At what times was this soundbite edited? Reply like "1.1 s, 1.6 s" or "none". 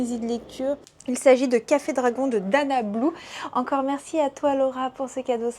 0.9 s